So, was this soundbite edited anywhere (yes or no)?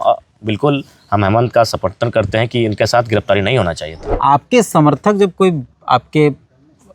yes